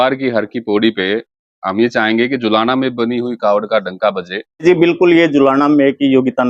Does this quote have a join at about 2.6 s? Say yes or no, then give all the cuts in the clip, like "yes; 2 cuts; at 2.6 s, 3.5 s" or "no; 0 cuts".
no; 1 cut; at 4.6 s